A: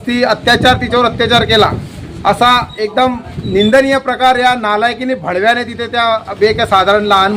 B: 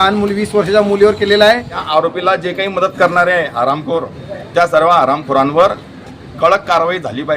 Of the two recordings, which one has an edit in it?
B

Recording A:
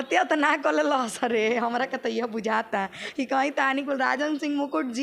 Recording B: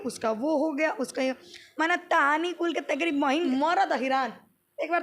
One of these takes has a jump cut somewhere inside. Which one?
B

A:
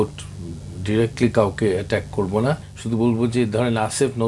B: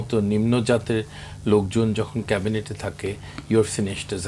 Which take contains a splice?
A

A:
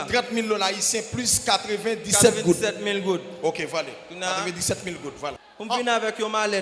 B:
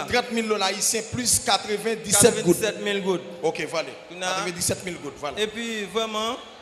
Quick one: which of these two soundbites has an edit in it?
A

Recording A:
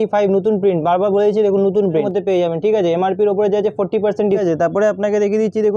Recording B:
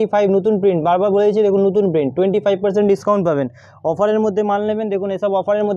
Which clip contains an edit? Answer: A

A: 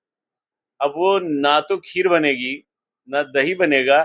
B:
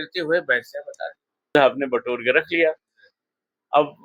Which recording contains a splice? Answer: B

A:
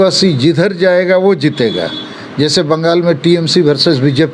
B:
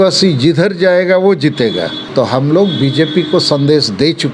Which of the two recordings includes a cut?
B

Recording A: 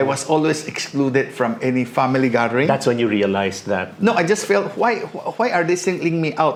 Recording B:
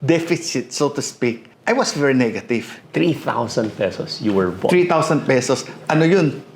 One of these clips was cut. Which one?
B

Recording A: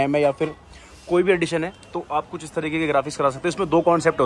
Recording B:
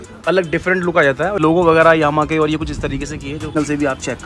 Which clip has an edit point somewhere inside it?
B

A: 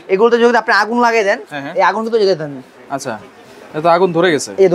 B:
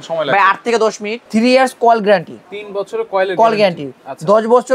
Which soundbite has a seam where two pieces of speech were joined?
B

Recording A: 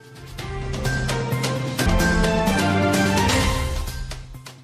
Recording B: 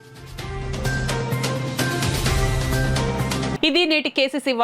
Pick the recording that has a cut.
A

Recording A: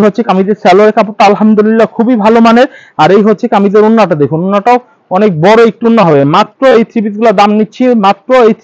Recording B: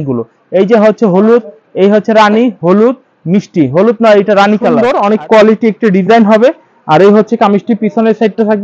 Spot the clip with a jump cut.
B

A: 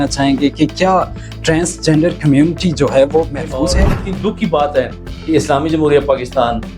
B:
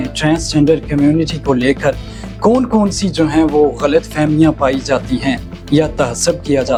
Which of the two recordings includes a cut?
A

